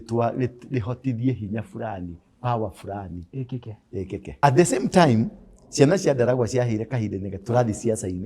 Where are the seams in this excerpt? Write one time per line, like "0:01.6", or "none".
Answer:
0:04.4